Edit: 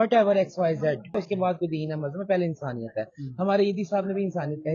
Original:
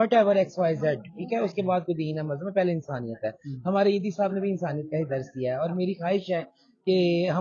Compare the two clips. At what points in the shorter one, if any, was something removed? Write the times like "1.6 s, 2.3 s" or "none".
1.1 s